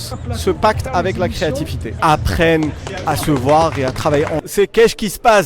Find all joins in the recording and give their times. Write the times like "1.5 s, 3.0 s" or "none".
1.8 s, 4.4 s